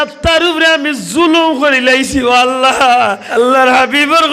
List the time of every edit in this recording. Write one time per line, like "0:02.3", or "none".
0:03.2